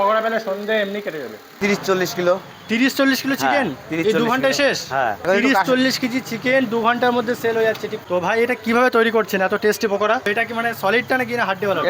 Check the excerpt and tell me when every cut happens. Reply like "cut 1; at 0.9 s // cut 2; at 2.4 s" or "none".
cut 1; at 1.8 s // cut 2; at 5.2 s // cut 3; at 7.9 s // cut 4; at 10.3 s